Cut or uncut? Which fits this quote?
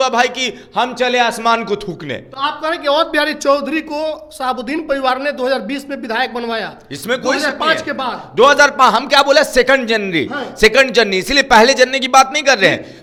uncut